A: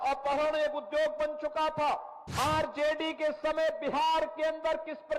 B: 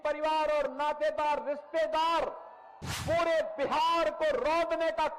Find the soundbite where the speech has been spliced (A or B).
A